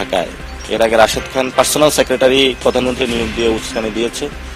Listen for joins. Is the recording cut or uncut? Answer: uncut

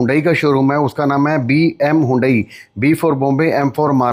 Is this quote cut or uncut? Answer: uncut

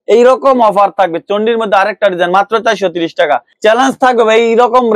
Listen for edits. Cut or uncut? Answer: cut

